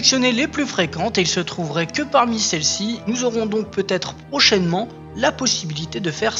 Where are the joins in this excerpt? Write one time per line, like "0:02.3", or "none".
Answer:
0:05.0